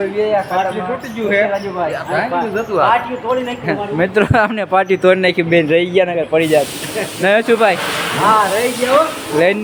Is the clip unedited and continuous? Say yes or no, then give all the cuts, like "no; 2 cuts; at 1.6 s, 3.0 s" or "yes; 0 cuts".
yes; 0 cuts